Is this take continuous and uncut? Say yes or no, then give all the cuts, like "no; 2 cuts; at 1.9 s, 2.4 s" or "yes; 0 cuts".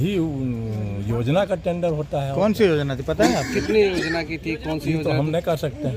yes; 0 cuts